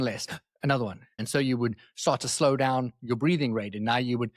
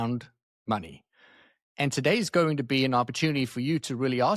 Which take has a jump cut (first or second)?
first